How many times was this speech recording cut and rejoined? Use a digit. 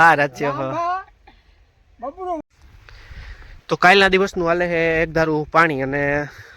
1